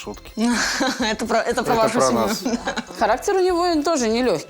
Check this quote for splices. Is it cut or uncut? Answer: cut